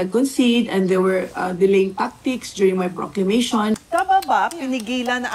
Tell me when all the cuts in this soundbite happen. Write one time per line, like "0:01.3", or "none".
0:03.8